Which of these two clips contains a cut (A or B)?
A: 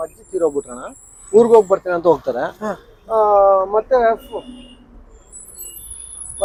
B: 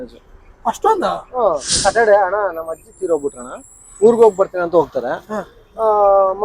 B